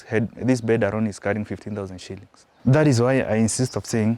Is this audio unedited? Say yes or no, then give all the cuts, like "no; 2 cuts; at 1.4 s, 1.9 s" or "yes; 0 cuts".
no; 1 cut; at 2.5 s